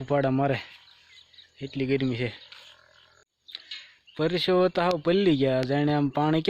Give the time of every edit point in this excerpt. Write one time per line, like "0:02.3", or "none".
0:03.4